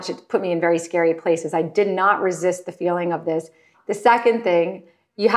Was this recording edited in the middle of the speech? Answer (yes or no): yes